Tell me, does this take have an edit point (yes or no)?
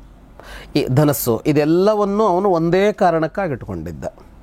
no